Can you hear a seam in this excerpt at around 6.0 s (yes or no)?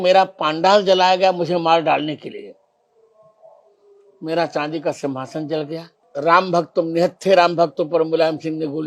yes